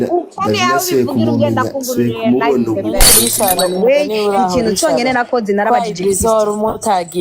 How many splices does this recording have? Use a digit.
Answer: 1